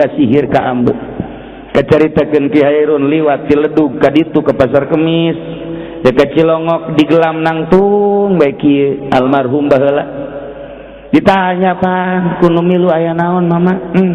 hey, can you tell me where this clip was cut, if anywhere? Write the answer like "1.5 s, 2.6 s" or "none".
none